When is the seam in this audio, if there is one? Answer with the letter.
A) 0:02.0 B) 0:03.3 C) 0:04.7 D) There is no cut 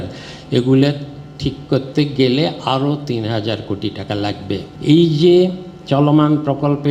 C